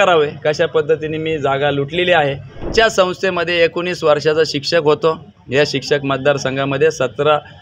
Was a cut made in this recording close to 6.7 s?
no; 1 cut; at 2.7 s

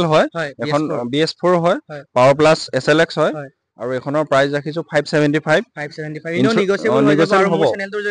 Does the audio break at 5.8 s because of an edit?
no; 0 cuts

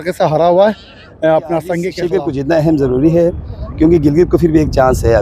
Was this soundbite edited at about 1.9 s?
yes; 1 cut; at 1.9 s

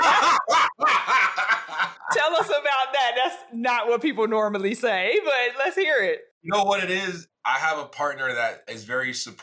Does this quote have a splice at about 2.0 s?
no; 2 cuts; at 6.3 s, 7.2 s

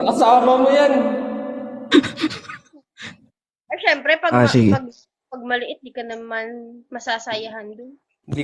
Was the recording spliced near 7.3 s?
no; 0 cuts

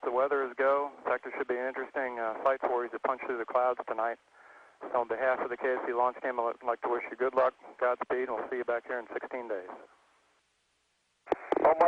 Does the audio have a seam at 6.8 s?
no; 1 cut; at 3.6 s

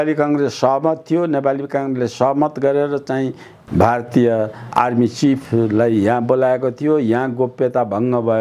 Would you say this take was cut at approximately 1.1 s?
no; 2 cuts; at 3.5 s, 4.7 s

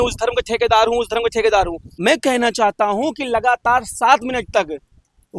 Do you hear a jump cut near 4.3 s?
no; 1 cut; at 1.8 s

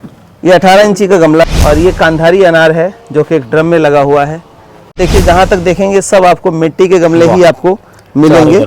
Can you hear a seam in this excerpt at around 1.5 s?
yes; 2 cuts; at 1.5 s, 5.0 s

